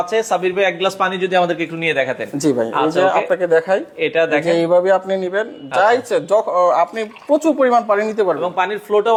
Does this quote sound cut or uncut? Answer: uncut